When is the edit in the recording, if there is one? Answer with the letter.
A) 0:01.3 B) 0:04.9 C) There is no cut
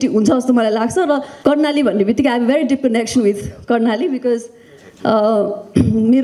A